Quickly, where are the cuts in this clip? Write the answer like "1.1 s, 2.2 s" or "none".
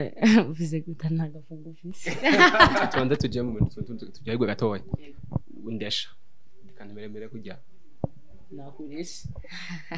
2.9 s